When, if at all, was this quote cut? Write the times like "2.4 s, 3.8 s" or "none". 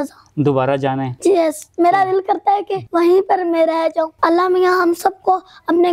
1.1 s, 2.8 s, 4.1 s